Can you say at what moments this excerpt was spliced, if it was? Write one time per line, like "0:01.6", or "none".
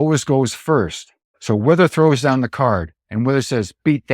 0:01.3
0:03.0